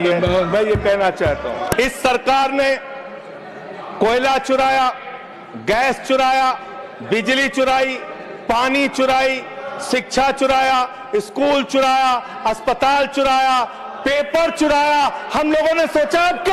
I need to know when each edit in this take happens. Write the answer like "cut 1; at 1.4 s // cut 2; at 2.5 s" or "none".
cut 1; at 1.7 s